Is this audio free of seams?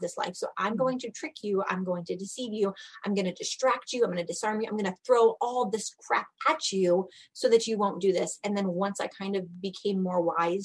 yes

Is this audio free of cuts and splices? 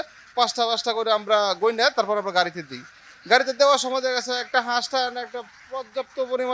yes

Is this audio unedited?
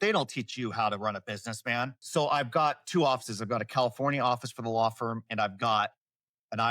no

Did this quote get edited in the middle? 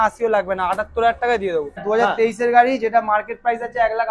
yes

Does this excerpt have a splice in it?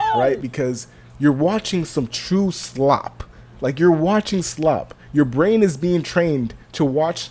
no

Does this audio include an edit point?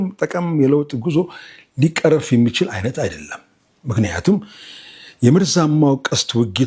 no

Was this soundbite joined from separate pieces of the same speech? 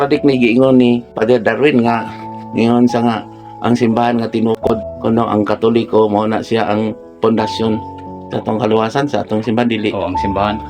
yes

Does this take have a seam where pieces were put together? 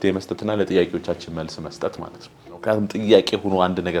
yes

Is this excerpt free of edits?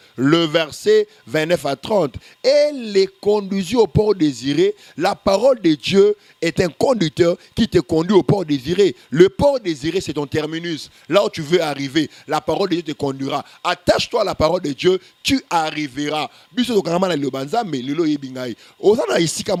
yes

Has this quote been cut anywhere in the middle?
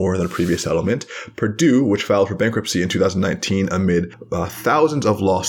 yes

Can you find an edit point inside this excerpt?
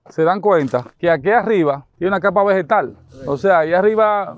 no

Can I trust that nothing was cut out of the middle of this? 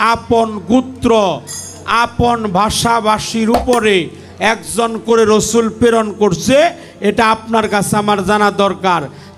yes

